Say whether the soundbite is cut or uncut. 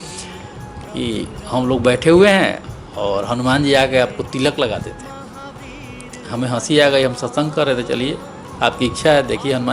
uncut